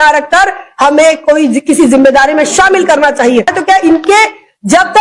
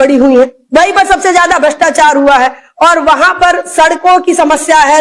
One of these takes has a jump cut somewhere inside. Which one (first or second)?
first